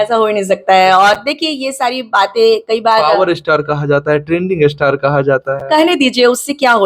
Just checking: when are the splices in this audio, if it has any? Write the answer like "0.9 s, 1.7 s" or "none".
none

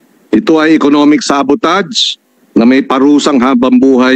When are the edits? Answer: none

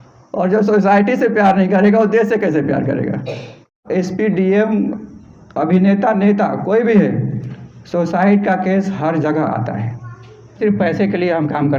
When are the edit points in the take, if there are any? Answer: 3.8 s, 10.6 s

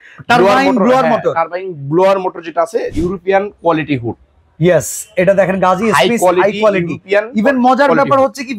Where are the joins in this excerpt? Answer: 2.9 s

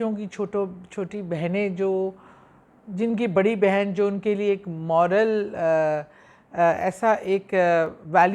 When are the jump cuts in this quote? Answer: none

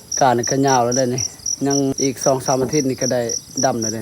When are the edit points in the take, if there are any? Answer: 1.9 s

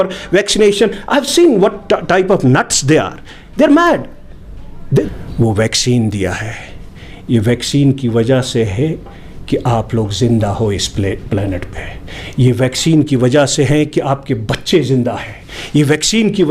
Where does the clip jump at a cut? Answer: 5.1 s

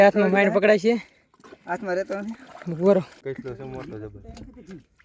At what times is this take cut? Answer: 3.2 s

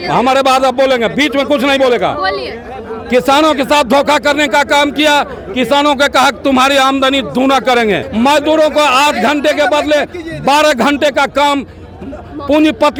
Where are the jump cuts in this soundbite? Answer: none

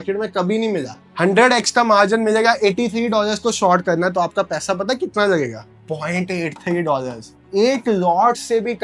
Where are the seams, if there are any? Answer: none

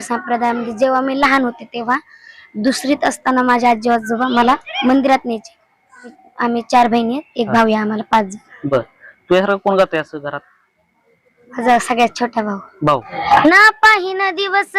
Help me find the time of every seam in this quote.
6.1 s, 13.2 s

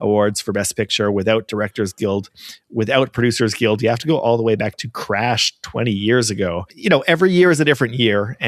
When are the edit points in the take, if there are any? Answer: 6.7 s

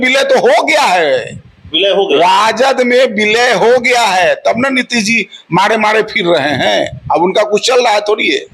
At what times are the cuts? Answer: none

